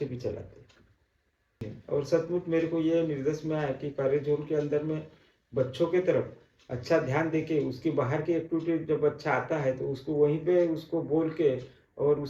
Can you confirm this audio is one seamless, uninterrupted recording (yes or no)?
no